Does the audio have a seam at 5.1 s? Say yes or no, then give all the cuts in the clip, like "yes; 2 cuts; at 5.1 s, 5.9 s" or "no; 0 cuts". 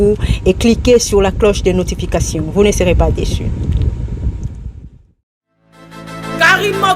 yes; 1 cut; at 5.1 s